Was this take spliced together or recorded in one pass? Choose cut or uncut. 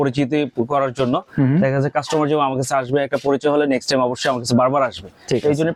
uncut